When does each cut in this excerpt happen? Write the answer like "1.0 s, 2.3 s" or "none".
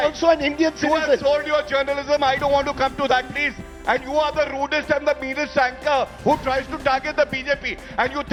none